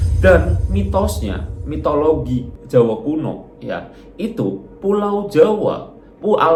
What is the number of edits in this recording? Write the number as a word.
zero